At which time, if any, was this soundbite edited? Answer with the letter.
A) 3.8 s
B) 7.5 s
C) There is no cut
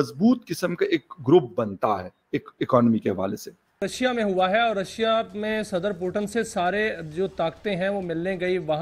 A